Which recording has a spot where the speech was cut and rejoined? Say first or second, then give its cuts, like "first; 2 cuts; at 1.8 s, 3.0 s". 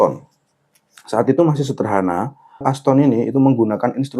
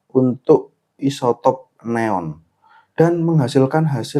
first; 1 cut; at 2.6 s